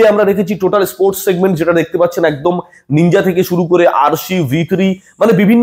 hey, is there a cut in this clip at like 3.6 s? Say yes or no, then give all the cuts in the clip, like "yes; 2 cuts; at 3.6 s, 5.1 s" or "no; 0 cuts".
no; 0 cuts